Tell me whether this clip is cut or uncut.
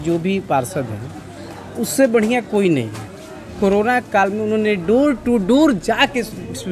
uncut